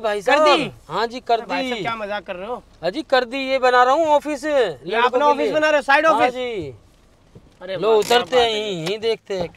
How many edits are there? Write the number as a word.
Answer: zero